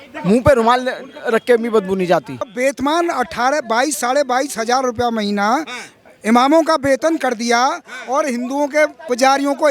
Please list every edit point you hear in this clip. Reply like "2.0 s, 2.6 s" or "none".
2.5 s